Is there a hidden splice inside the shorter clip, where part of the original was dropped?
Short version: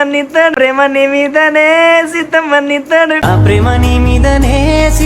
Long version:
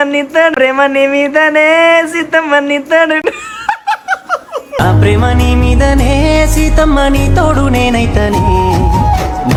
yes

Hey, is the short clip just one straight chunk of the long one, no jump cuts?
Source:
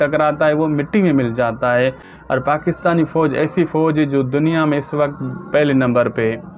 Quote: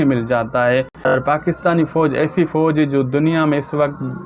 no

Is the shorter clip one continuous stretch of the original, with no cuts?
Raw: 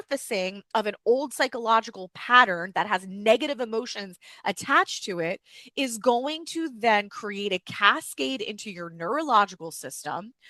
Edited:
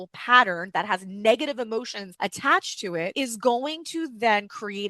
no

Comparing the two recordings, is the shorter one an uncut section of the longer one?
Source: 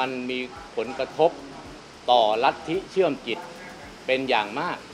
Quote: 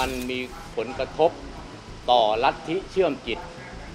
yes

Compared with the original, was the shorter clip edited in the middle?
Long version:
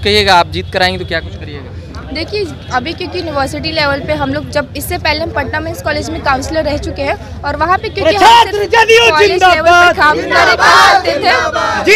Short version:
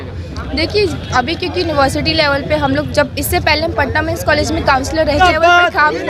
yes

